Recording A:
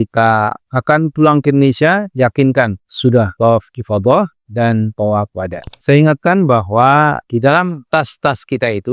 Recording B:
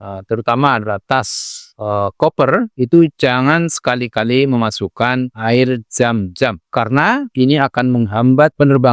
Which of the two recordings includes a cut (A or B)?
A